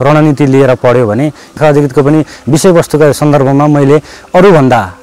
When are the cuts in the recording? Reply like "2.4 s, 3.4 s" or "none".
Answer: 1.6 s